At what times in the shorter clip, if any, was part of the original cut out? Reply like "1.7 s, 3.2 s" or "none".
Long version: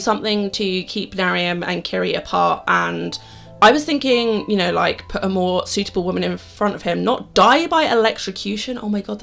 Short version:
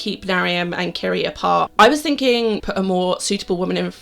1.7 s, 2.6 s